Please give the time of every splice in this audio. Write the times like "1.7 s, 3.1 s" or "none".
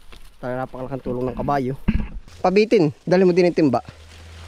2.2 s